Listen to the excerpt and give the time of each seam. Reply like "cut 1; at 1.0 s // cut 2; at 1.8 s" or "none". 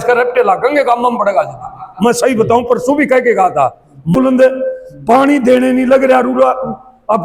cut 1; at 4.1 s